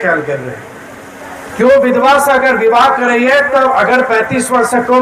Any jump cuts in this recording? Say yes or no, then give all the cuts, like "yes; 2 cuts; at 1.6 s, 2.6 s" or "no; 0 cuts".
no; 0 cuts